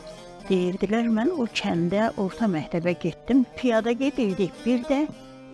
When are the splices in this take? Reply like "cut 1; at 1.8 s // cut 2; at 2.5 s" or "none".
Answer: cut 1; at 3.5 s